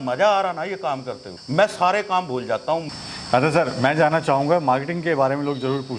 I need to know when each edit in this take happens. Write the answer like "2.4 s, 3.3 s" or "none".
none